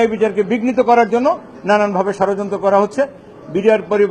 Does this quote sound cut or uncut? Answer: uncut